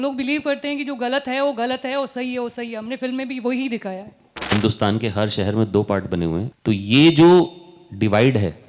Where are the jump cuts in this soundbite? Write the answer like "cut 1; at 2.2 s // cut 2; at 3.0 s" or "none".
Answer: cut 1; at 4.5 s // cut 2; at 6.5 s